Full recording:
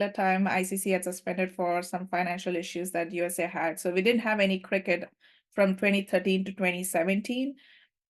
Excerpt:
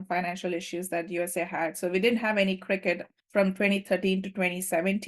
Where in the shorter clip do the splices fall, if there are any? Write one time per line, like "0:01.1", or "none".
0:03.1